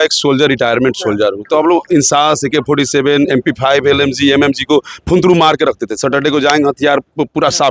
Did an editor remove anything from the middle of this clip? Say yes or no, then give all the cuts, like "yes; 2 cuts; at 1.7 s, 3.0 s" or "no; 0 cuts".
no; 0 cuts